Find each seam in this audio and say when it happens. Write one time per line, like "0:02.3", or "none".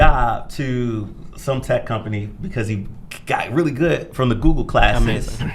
none